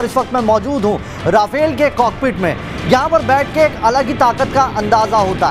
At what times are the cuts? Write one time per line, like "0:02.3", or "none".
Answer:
none

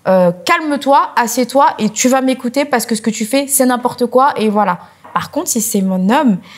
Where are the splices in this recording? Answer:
0:05.1

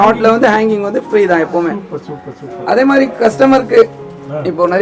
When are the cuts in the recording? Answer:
none

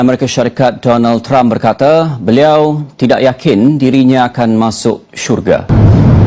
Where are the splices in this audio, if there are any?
none

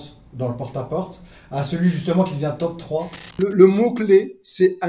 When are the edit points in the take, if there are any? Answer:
0:03.4

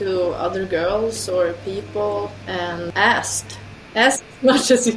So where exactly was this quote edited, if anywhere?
0:02.5

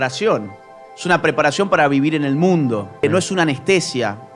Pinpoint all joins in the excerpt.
0:03.0

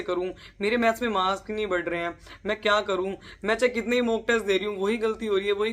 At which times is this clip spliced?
none

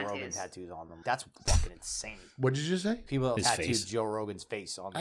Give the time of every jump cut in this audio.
0:00.9
0:03.3

